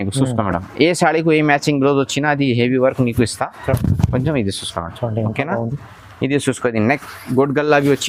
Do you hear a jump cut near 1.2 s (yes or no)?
no